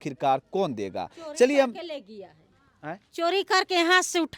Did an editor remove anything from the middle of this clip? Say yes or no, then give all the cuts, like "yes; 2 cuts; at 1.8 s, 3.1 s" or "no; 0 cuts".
no; 0 cuts